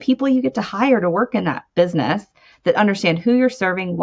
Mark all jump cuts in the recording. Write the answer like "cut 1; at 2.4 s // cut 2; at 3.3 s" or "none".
cut 1; at 1.6 s